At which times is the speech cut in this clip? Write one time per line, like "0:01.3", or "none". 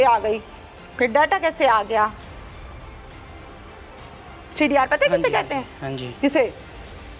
none